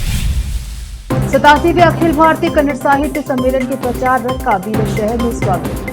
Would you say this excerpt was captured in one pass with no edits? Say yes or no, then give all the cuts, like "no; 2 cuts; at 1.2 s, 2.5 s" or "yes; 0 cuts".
no; 1 cut; at 1.0 s